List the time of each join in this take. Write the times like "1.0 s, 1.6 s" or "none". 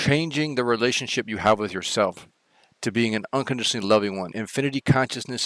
4.3 s